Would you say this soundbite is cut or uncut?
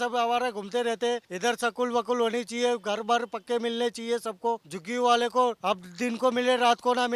cut